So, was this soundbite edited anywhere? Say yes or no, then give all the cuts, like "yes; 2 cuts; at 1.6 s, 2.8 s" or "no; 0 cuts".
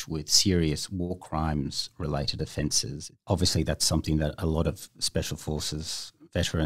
yes; 1 cut; at 3.1 s